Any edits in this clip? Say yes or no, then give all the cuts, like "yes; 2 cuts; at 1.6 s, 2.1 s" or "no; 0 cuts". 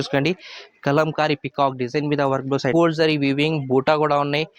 yes; 1 cut; at 2.7 s